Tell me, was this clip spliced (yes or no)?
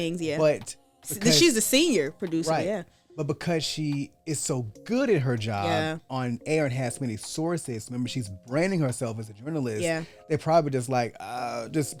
no